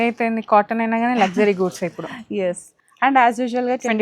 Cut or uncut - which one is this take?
cut